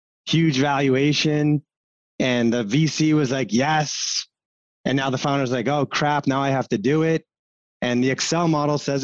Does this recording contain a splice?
no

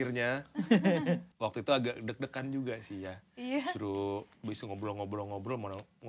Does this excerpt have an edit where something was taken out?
yes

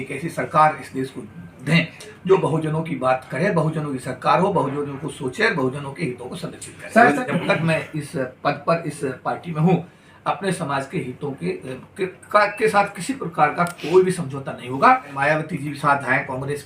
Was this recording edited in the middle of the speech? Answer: yes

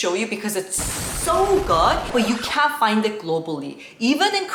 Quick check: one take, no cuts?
yes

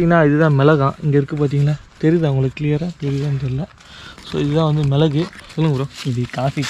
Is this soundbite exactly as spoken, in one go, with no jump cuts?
no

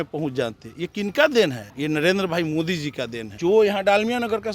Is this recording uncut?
no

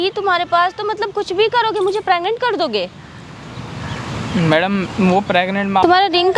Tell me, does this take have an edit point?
no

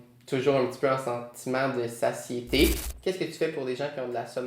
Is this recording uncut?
no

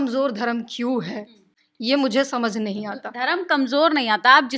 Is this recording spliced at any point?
no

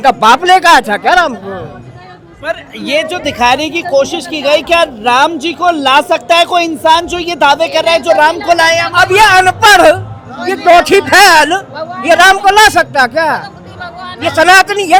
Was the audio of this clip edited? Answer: no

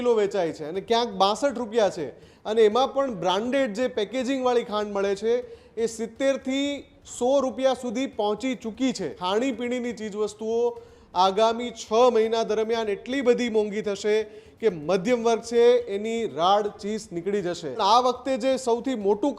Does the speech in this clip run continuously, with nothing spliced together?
no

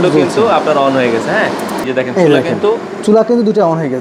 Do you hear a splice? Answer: no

